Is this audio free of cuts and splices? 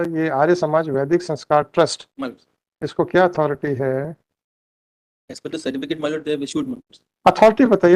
yes; 0 cuts

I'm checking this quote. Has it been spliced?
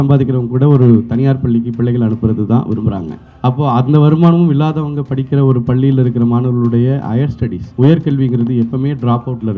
no; 0 cuts

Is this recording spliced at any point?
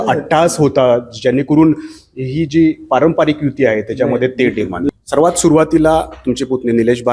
yes; 1 cut; at 5.0 s

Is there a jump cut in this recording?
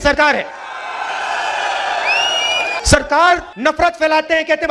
yes; 2 cuts; at 2.8 s, 3.5 s

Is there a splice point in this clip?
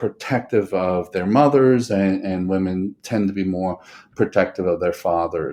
no; 0 cuts

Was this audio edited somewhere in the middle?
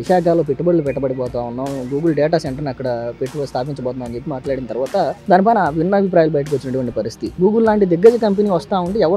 yes; 1 cut; at 7.3 s

